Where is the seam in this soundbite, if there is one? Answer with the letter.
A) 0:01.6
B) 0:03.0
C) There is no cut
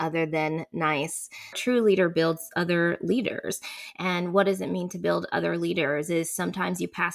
A